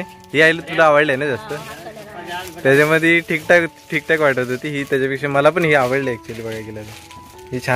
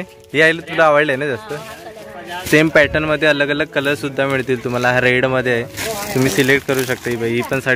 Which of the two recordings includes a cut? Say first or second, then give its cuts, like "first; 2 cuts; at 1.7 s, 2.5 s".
second; 2 cuts; at 2.4 s, 5.8 s